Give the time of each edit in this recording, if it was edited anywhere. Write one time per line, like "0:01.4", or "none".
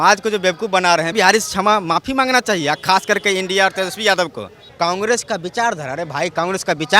0:01.1
0:04.6